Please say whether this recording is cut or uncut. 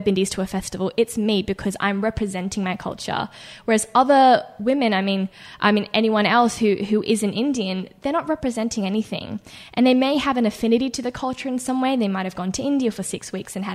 uncut